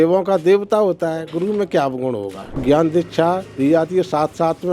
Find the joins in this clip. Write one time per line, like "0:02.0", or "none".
0:02.6